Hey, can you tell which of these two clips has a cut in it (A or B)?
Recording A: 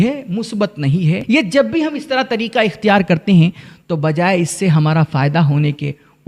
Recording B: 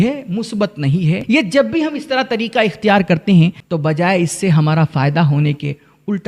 B